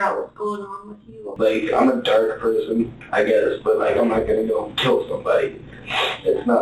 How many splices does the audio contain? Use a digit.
1